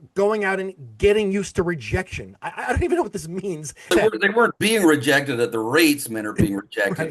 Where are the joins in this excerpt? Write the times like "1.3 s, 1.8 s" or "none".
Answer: 3.9 s